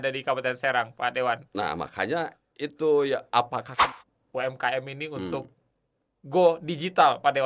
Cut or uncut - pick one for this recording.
cut